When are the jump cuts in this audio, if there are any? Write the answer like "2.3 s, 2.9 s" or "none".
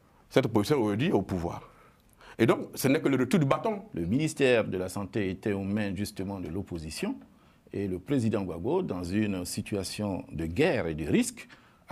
3.9 s